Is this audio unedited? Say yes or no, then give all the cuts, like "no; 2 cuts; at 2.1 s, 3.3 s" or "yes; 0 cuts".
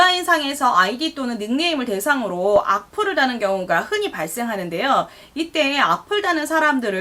yes; 0 cuts